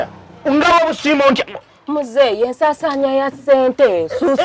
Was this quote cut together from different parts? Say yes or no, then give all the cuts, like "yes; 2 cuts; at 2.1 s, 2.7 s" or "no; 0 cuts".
no; 0 cuts